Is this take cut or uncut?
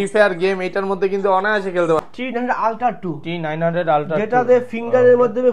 cut